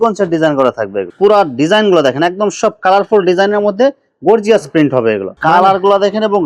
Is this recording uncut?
no; 2 cuts; at 1.0 s, 5.3 s

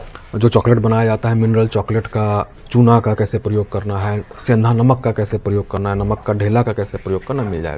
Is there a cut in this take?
no; 0 cuts

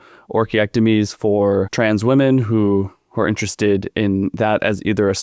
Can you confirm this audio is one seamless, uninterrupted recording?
yes; 0 cuts

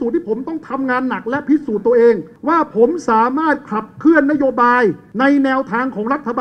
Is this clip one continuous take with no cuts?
no; 2 cuts; at 2.3 s, 5.1 s

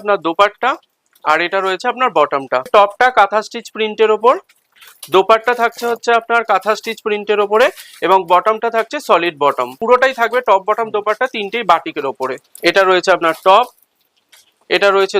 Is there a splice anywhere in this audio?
yes; 3 cuts; at 2.7 s, 9.8 s, 12.5 s

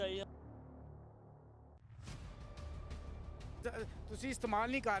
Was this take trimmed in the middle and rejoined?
yes; 1 cut; at 3.6 s

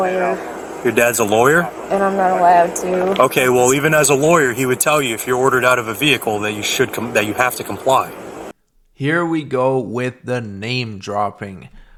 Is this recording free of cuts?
yes; 0 cuts

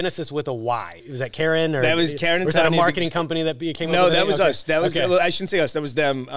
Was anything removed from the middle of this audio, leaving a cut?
yes; 1 cut; at 0.9 s

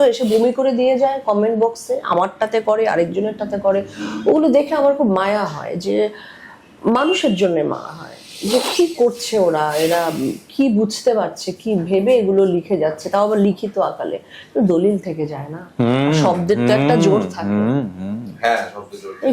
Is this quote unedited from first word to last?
yes; 0 cuts

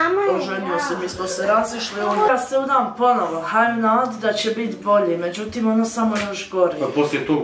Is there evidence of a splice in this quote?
yes; 1 cut; at 2.3 s

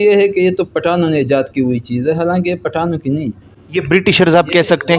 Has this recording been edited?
no; 0 cuts

